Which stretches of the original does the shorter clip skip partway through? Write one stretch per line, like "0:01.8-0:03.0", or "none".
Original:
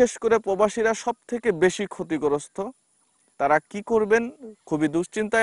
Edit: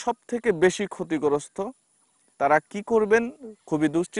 none